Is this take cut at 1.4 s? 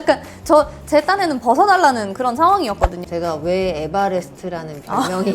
no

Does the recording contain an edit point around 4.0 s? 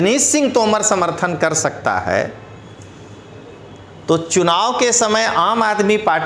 no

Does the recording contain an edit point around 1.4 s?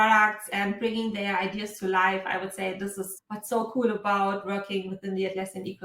no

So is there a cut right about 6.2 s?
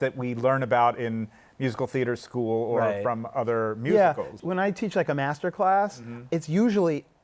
yes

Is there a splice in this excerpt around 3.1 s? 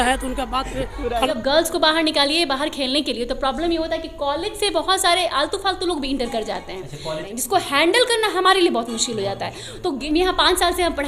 no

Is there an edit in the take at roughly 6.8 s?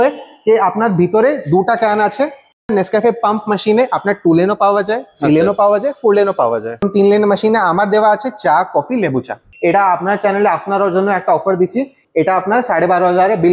yes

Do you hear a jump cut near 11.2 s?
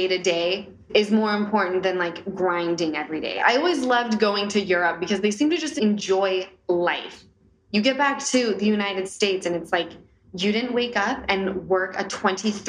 yes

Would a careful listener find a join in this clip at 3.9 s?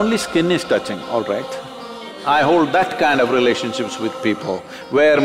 no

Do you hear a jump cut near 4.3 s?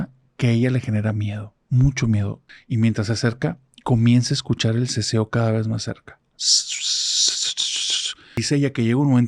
no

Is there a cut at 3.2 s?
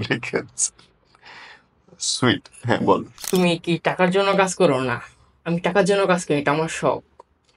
yes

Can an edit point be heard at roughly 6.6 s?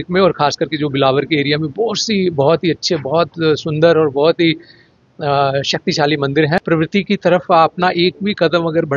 yes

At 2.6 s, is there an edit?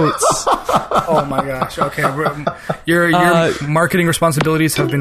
no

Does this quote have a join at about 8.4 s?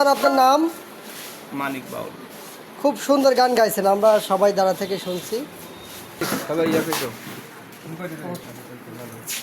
yes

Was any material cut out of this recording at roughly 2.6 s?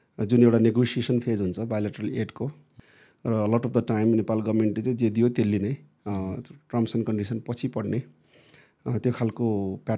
yes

